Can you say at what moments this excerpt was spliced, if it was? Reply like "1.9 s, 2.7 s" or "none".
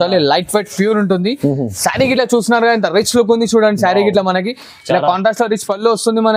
none